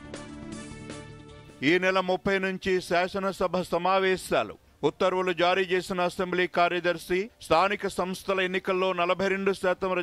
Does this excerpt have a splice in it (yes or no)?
no